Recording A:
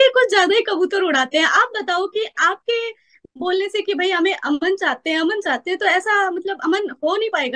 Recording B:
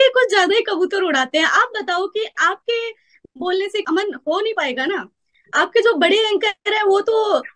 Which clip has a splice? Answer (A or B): B